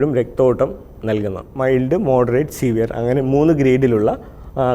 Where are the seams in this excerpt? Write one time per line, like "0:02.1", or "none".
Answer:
0:01.4